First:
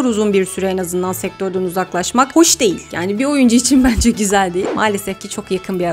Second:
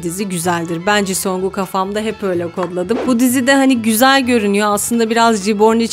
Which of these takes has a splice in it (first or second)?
first